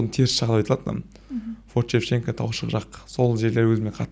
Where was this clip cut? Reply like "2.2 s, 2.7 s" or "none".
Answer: none